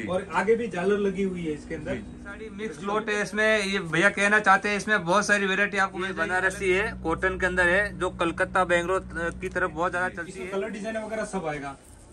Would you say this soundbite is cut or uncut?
cut